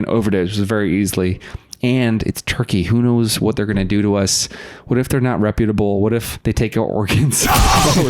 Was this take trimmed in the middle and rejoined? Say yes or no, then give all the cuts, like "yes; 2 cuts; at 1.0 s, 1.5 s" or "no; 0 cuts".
yes; 1 cut; at 6.3 s